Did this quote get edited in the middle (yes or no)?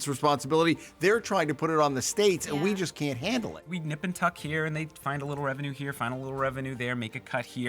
yes